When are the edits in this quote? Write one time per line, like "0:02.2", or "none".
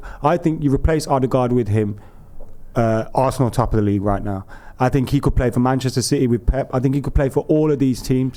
none